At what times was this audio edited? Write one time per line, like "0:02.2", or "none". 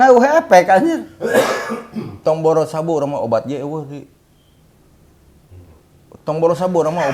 none